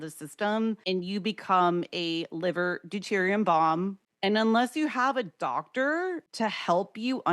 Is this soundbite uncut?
no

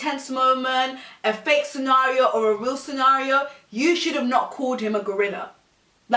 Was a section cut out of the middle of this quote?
no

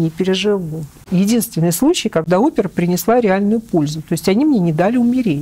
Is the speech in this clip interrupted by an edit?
yes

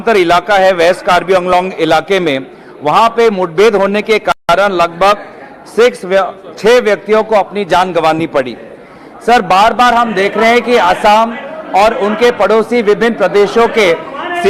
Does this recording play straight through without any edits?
yes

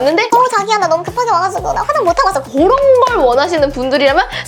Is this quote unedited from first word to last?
yes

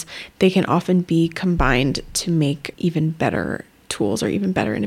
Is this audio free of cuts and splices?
yes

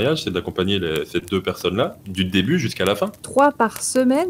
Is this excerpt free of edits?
no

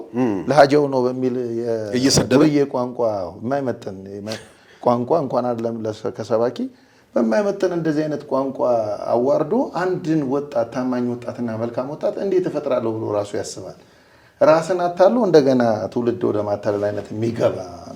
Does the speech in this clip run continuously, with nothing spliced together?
yes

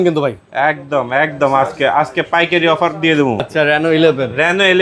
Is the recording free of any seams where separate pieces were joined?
no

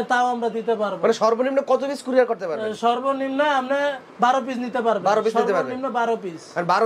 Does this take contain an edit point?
no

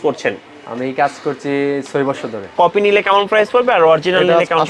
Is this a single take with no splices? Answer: no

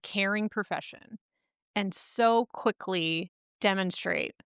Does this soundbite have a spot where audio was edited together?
yes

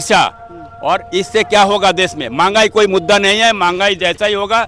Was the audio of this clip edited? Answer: no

